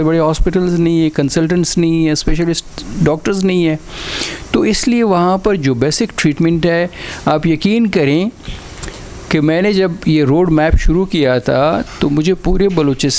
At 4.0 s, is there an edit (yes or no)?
no